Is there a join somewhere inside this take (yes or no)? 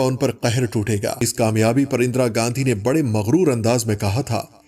yes